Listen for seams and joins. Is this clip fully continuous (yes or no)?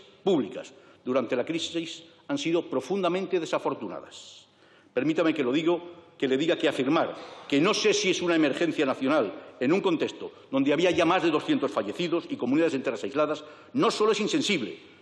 yes